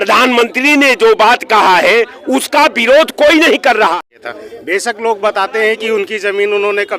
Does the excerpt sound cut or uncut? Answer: cut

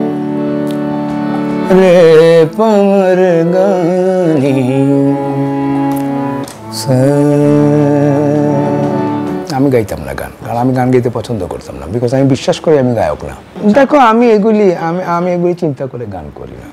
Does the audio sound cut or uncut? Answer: cut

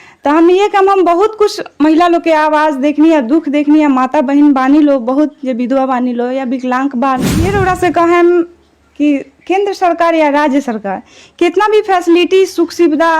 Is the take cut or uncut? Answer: cut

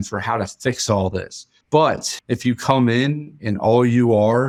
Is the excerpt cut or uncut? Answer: uncut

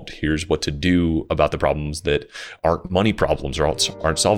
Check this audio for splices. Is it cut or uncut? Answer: uncut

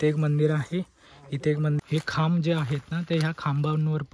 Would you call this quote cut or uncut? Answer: cut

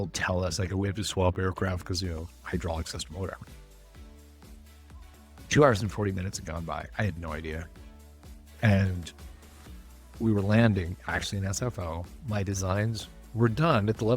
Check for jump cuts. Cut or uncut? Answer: cut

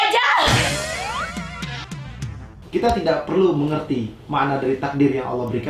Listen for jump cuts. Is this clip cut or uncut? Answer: cut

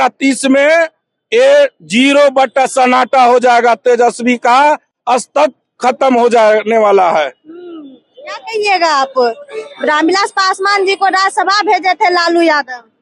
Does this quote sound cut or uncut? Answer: uncut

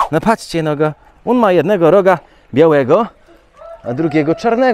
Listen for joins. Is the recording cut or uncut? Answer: uncut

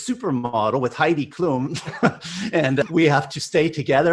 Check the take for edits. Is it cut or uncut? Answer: uncut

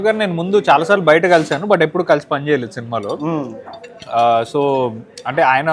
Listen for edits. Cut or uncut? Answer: uncut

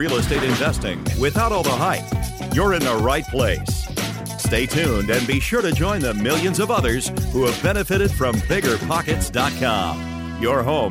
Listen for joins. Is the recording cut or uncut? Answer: uncut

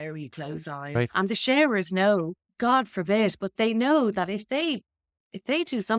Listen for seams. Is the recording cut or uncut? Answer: cut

